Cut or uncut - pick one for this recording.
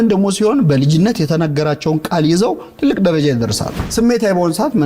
cut